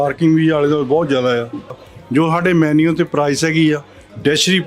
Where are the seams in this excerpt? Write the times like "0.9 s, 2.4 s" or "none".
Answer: 1.9 s